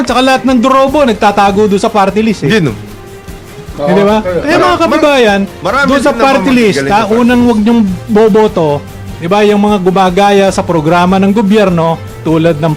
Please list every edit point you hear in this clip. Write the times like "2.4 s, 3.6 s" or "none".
none